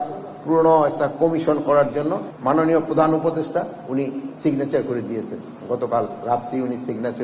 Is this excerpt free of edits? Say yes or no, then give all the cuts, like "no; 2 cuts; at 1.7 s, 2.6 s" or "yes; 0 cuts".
no; 1 cut; at 2.3 s